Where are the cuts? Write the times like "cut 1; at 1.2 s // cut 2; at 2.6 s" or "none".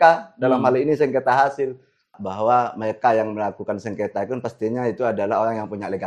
cut 1; at 2.2 s